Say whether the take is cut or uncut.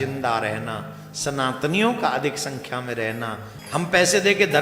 cut